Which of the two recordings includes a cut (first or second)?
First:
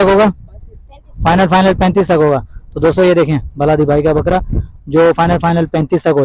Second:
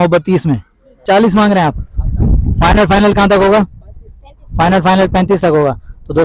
second